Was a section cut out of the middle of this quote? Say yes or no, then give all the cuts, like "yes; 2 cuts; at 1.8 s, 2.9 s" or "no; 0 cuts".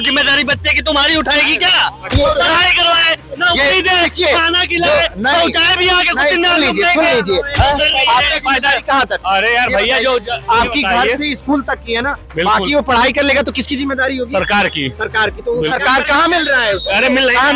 yes; 2 cuts; at 2.1 s, 7.5 s